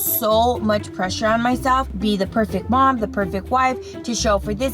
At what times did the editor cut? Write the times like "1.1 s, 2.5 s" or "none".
none

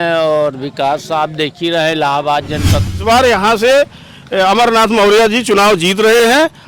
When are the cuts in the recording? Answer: 2.9 s

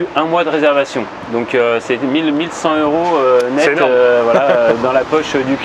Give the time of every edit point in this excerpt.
none

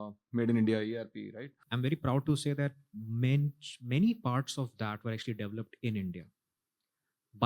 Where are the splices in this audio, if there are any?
1.6 s

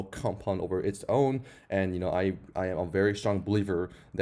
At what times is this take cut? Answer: none

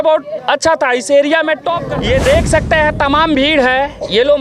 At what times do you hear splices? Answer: 1.8 s

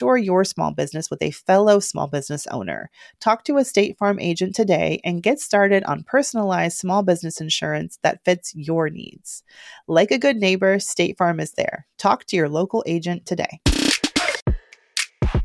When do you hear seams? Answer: 14.4 s

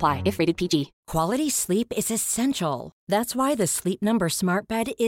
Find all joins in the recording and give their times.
1.0 s

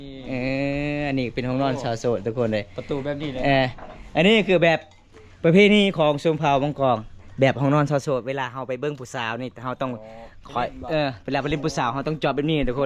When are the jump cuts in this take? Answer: none

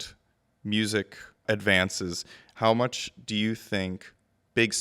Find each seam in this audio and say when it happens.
1.4 s

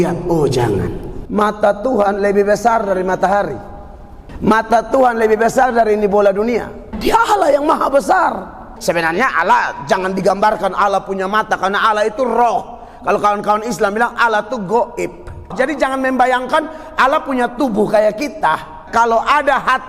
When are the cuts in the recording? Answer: 1.1 s, 6.8 s, 8.7 s, 15.5 s, 18.8 s

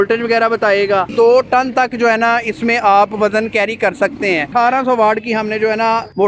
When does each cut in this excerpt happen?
1.1 s, 4.5 s

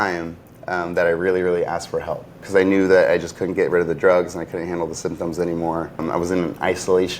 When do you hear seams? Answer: 2.4 s, 6.0 s

